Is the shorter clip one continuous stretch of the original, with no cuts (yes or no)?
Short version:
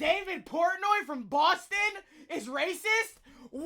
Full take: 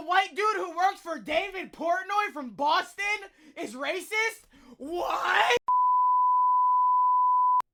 yes